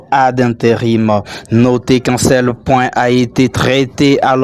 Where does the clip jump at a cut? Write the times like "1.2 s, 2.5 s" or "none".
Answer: 2.4 s